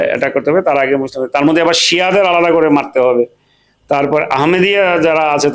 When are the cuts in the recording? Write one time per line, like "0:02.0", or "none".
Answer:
none